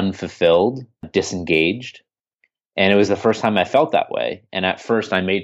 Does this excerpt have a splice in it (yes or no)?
yes